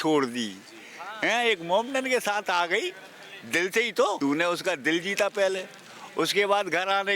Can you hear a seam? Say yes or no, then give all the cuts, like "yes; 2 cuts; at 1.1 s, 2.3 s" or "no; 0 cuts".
yes; 1 cut; at 4.2 s